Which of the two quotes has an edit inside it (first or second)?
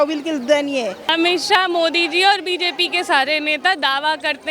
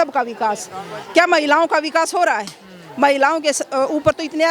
first